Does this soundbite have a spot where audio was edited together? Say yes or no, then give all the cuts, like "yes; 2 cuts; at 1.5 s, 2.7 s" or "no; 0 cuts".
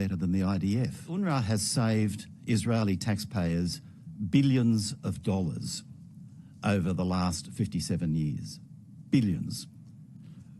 yes; 1 cut; at 1.1 s